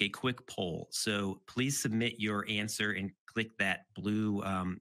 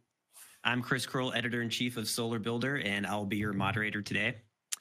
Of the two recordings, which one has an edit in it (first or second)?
second